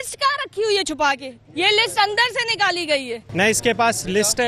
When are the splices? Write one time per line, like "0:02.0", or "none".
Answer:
0:01.4
0:03.2